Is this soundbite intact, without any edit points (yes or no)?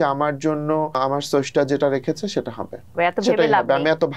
no